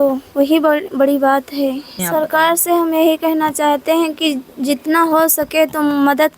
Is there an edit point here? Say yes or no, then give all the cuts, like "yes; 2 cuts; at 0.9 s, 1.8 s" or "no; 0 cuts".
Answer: yes; 1 cut; at 1.9 s